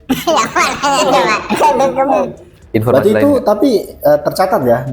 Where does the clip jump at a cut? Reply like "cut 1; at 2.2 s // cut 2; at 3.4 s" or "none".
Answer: cut 1; at 2.6 s